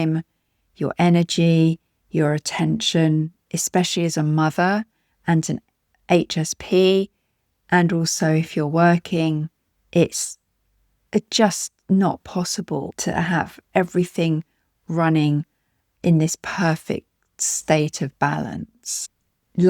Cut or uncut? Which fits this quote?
cut